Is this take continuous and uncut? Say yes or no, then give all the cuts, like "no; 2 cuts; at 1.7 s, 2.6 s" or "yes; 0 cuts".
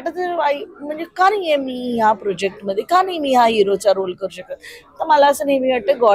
yes; 0 cuts